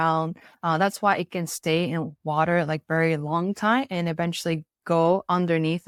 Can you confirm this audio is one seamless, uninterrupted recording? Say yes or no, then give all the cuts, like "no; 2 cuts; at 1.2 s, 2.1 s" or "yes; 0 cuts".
yes; 0 cuts